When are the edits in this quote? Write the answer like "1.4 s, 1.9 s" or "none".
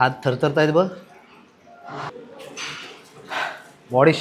none

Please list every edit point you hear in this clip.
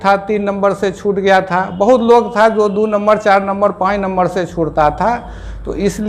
none

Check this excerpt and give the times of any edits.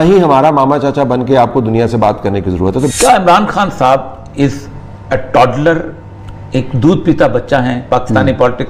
2.9 s

